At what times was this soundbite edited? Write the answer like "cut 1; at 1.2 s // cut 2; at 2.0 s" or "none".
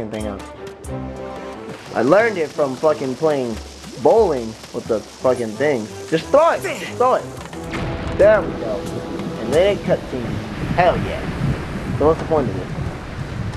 cut 1; at 12.6 s